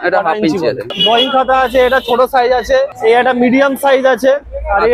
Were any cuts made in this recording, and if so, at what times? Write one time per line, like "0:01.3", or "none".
0:01.0
0:02.9